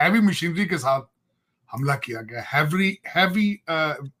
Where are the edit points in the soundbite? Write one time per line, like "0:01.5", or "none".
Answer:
none